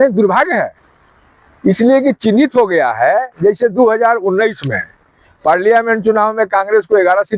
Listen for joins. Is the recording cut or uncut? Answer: uncut